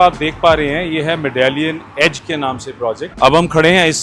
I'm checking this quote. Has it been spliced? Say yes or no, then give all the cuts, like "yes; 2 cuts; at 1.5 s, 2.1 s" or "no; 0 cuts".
yes; 1 cut; at 3.1 s